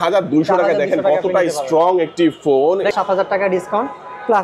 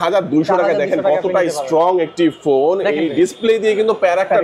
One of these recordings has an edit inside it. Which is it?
first; 1 cut; at 2.9 s

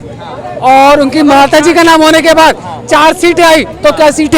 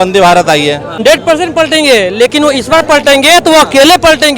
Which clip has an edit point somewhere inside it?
second; 1 cut; at 1.0 s

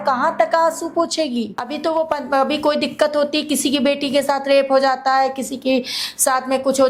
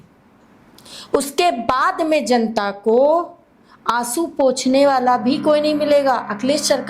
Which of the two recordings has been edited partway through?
first; 1 cut; at 1.6 s

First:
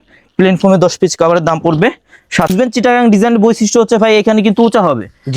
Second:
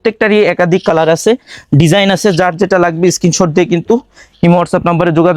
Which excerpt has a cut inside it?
first; 1 cut; at 2.5 s

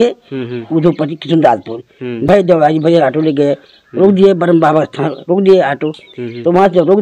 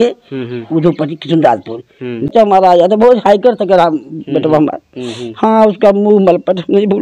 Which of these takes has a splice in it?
second; 1 cut; at 2.3 s

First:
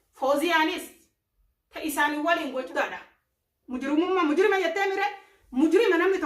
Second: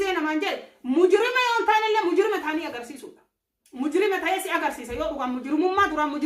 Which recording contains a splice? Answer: first; 1 cut; at 2.7 s

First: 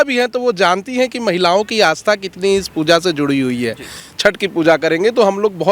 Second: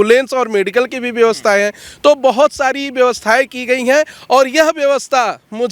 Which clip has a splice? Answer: first; 1 cut; at 4.0 s

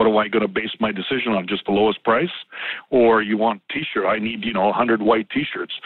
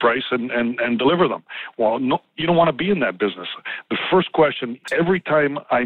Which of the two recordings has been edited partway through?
second; 1 cut; at 4.8 s

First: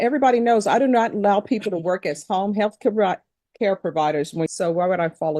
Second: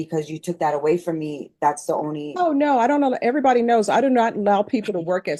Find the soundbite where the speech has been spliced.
first; 1 cut; at 4.5 s

